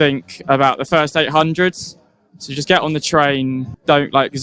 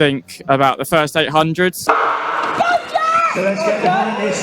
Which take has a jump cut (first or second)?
second